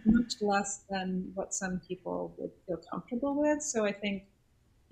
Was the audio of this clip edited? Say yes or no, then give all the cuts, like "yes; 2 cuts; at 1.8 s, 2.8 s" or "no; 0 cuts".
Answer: no; 0 cuts